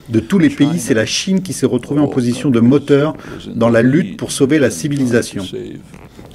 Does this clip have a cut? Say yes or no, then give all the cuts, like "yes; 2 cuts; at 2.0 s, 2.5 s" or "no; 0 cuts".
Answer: yes; 1 cut; at 3.9 s